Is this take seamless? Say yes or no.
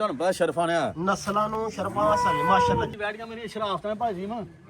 no